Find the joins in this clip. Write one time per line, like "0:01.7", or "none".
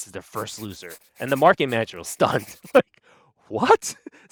none